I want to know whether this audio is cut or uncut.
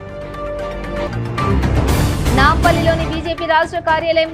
uncut